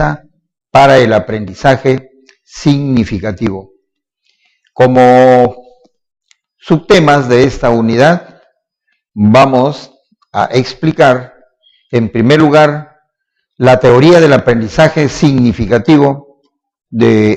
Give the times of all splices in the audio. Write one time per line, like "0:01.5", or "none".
none